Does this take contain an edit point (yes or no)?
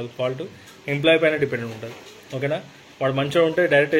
no